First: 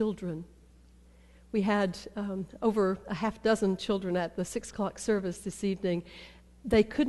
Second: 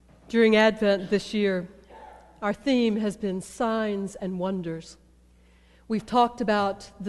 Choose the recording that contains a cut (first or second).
first